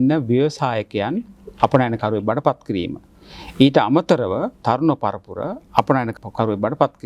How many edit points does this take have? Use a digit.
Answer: 2